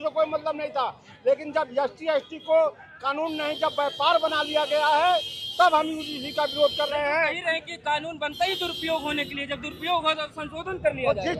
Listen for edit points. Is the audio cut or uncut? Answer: uncut